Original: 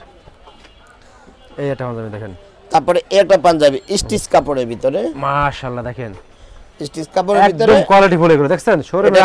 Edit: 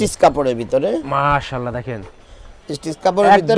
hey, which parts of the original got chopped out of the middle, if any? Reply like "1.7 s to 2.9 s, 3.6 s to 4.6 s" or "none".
none